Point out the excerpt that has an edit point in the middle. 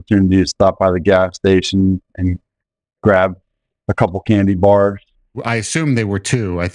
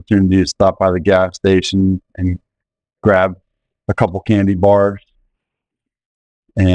first; 1 cut; at 5.4 s

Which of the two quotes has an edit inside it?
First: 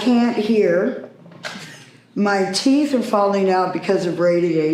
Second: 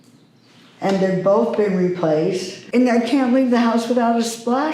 second; 1 cut; at 2.5 s

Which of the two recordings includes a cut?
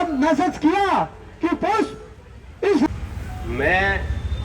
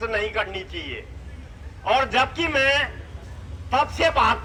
first; 1 cut; at 2.9 s

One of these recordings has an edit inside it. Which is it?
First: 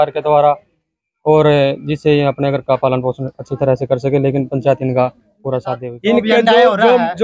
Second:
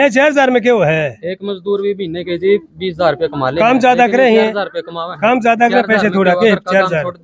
first; 1 cut; at 5.8 s

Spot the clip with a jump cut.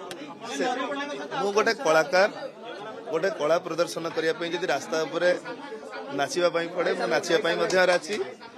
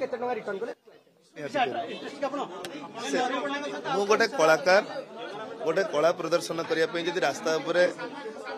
second; 1 cut; at 1.4 s

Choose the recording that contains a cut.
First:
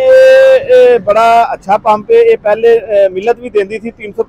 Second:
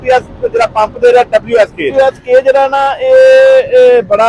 second; 1 cut; at 1.9 s

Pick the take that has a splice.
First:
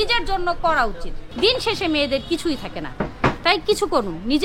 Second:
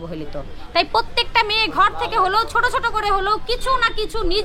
first; 1 cut; at 1.2 s

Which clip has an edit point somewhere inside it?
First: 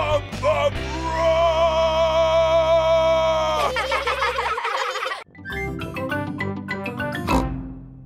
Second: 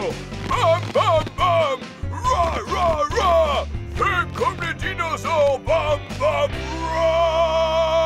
first; 1 cut; at 5.2 s

